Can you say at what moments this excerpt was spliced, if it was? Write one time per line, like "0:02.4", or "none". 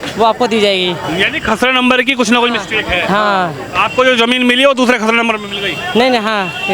none